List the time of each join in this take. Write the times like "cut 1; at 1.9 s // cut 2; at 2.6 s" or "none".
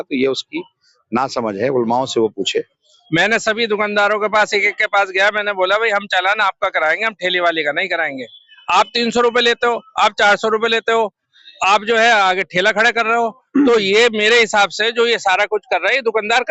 cut 1; at 2.9 s